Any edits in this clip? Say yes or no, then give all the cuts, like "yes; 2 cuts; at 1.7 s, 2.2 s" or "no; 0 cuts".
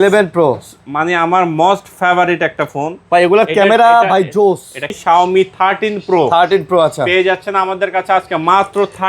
yes; 1 cut; at 4.9 s